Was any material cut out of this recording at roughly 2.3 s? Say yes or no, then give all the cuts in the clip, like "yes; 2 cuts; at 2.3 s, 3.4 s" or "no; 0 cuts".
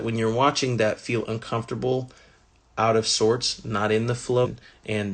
no; 0 cuts